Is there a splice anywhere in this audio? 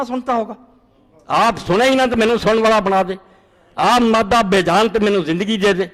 no; 0 cuts

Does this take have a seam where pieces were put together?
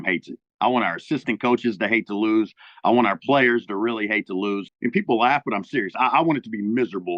yes; 1 cut; at 4.7 s

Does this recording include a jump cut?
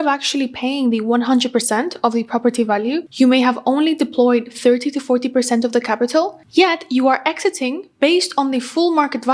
no; 0 cuts

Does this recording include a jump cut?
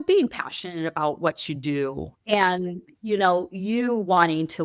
no; 0 cuts

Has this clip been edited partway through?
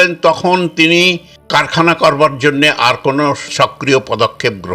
yes; 2 cuts; at 1.3 s, 3.5 s

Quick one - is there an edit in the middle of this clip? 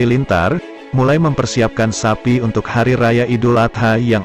no; 0 cuts

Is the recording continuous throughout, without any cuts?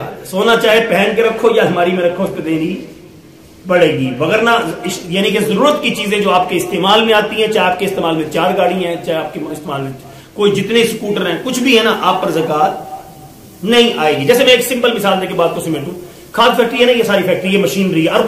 yes; 0 cuts

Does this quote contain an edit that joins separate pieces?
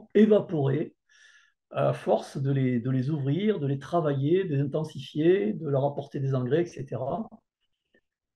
no; 0 cuts

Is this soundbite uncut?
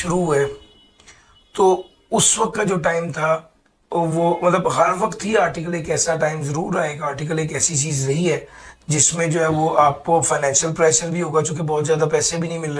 yes; 0 cuts

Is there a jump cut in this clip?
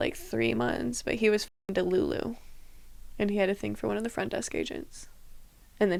no; 0 cuts

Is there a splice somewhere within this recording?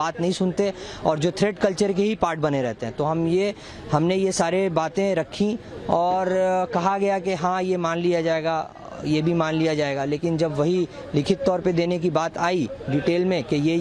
no; 0 cuts

